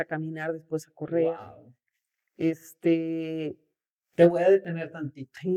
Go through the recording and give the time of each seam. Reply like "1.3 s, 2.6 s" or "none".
none